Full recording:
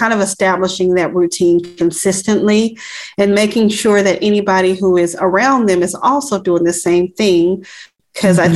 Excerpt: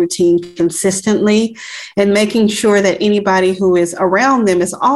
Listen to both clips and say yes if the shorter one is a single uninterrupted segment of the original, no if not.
yes